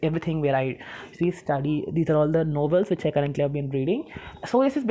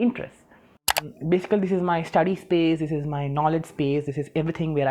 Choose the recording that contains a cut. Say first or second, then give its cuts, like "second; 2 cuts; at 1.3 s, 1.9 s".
second; 1 cut; at 0.9 s